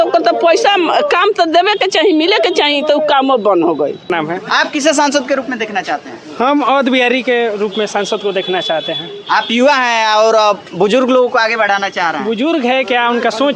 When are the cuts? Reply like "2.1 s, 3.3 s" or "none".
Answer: 4.1 s